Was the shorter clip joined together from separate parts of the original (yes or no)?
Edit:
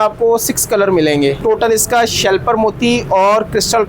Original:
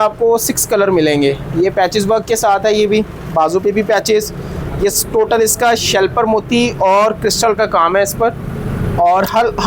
yes